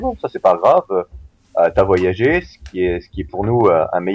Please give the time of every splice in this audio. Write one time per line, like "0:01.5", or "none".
none